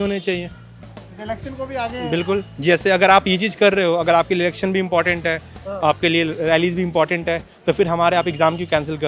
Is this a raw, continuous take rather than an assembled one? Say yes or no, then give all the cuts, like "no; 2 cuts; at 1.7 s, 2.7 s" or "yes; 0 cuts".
yes; 0 cuts